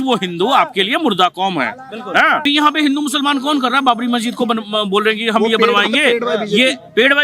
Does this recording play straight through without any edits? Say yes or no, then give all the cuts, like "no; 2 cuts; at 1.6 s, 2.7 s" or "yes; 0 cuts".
no; 1 cut; at 2.4 s